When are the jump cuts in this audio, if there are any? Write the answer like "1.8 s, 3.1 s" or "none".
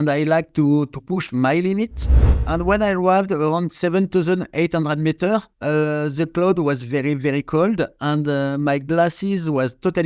2.4 s, 5.5 s